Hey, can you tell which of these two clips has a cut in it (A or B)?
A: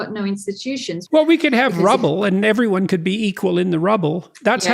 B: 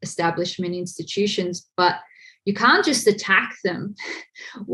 A